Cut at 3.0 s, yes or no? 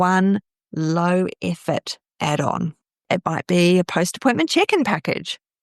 yes